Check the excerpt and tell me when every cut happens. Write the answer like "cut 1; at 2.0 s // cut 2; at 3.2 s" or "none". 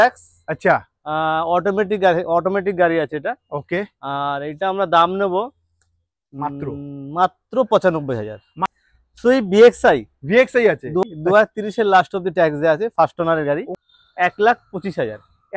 cut 1; at 8.7 s // cut 2; at 11.0 s // cut 3; at 13.7 s